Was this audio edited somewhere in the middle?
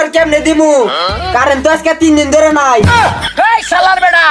yes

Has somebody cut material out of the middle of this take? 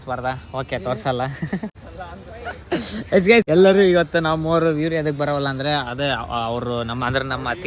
no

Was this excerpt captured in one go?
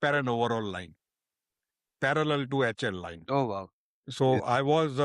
yes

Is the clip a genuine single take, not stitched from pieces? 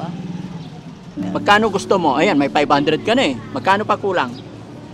no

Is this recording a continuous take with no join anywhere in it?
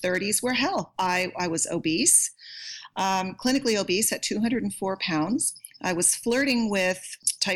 yes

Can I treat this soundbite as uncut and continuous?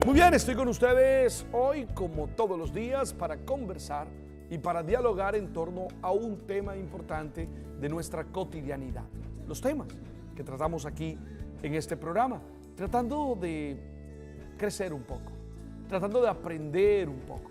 yes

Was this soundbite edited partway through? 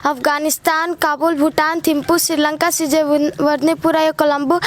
no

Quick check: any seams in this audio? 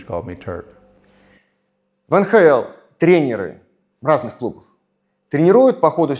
no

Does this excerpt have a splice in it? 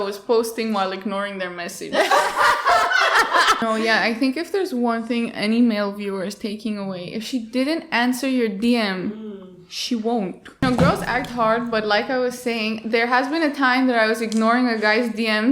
yes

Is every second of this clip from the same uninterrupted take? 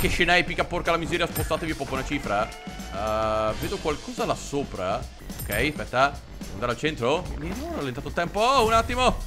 yes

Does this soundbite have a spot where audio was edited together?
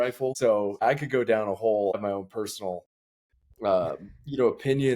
yes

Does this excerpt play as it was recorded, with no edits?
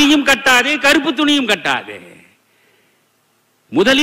yes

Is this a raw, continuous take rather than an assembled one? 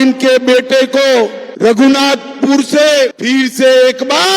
yes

